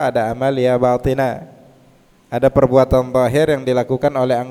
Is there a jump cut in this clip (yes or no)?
no